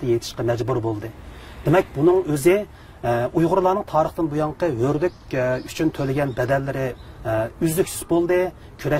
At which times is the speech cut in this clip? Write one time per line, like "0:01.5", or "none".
none